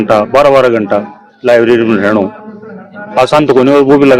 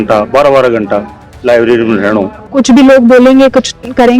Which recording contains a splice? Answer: second; 1 cut; at 2.5 s

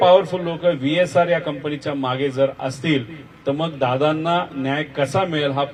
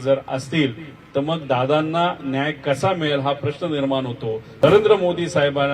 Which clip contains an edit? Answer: second; 1 cut; at 4.5 s

